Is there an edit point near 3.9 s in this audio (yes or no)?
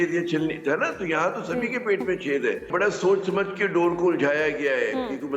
no